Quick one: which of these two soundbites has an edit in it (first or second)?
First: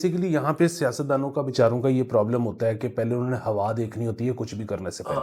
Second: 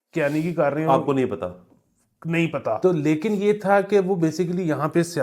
second